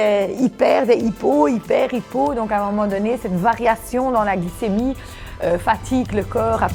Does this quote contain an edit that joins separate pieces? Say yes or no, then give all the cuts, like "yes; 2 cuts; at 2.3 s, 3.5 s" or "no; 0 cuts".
no; 0 cuts